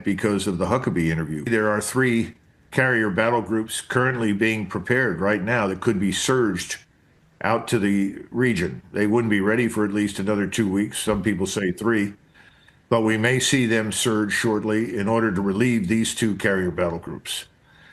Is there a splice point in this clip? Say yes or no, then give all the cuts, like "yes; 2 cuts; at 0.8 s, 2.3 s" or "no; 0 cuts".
yes; 1 cut; at 1.5 s